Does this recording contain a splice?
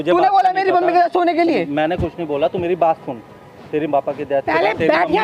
no; 0 cuts

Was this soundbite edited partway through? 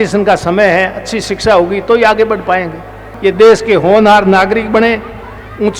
yes; 1 cut; at 3.1 s

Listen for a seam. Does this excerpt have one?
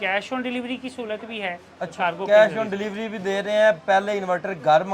yes; 1 cut; at 1.9 s

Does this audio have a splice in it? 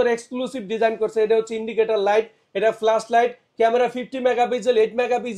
no; 0 cuts

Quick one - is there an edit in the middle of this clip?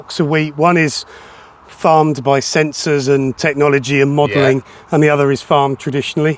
no; 0 cuts

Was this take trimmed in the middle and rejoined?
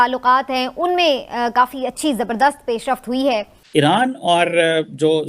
yes; 1 cut; at 3.5 s

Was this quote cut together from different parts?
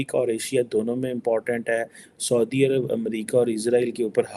no; 0 cuts

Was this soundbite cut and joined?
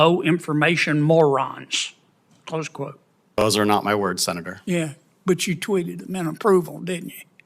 yes; 1 cut; at 3.4 s

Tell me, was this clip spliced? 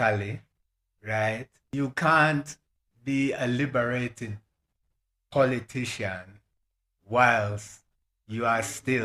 yes; 1 cut; at 1.6 s

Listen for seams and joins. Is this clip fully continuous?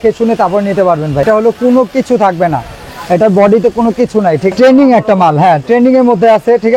no; 2 cuts; at 1.2 s, 4.5 s

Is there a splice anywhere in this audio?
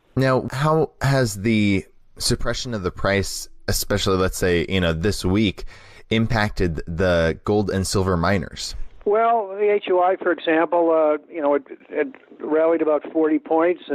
no; 0 cuts

